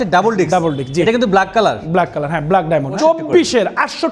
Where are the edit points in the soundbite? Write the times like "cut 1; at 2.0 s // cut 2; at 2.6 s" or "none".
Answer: cut 1; at 3.0 s